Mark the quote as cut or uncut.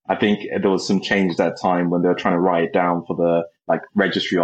uncut